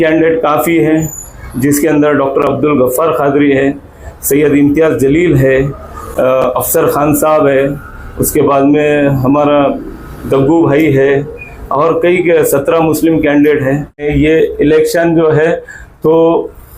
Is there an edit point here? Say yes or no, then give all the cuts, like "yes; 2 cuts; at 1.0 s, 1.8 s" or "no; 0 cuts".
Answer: yes; 1 cut; at 14.0 s